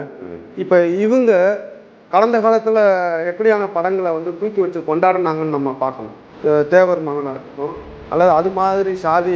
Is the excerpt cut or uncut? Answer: cut